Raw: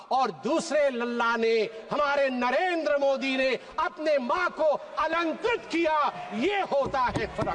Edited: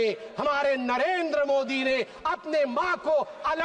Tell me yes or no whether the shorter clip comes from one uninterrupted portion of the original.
yes